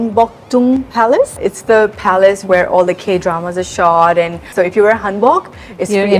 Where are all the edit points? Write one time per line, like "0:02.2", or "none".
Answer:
0:01.4
0:04.5